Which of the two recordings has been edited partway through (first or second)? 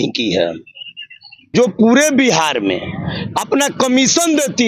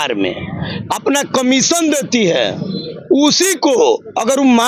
first